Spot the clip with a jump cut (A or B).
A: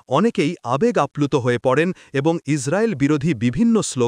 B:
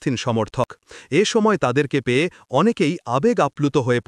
B